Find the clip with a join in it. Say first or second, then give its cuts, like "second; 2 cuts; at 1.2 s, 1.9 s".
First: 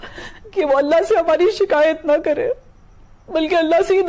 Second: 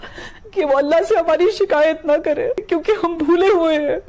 second; 1 cut; at 2.6 s